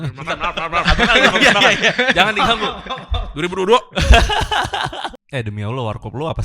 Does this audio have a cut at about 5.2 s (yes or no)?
yes